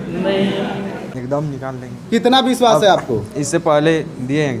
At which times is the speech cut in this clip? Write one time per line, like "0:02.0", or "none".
0:01.1